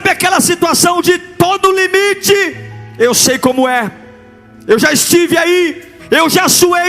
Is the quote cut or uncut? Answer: cut